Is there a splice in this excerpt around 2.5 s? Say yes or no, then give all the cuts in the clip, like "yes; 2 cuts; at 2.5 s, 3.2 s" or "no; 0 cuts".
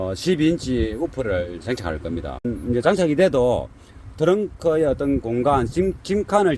yes; 1 cut; at 2.5 s